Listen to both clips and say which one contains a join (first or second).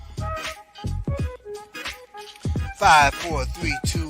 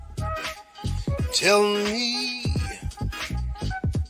first